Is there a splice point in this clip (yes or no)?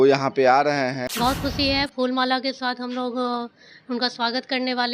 yes